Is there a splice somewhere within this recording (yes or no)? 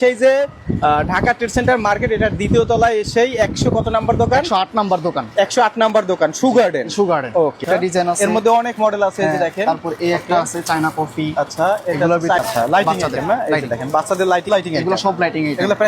yes